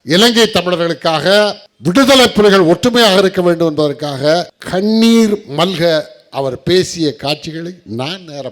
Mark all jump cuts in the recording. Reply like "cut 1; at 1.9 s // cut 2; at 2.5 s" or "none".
cut 1; at 1.7 s // cut 2; at 4.6 s